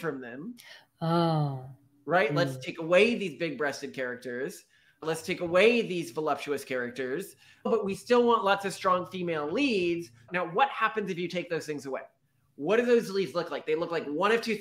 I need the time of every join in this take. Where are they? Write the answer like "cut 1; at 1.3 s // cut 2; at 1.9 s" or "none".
cut 1; at 7.7 s // cut 2; at 10.3 s